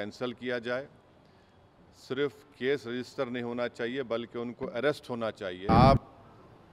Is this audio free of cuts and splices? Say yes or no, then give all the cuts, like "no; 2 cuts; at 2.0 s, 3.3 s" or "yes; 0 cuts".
no; 1 cut; at 5.7 s